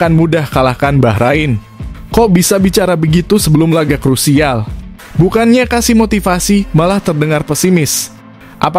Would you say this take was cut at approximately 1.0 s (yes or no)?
no